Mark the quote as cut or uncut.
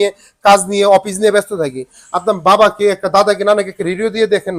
uncut